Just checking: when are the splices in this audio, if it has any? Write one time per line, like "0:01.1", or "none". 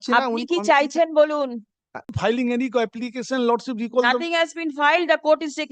0:02.1